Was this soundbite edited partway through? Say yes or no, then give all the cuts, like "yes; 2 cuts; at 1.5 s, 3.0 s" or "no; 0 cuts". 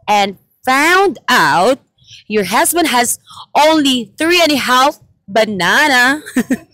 no; 0 cuts